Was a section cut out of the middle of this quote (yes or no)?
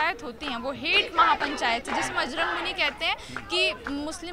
no